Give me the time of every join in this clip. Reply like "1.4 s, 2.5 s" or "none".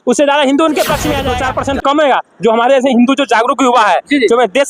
1.3 s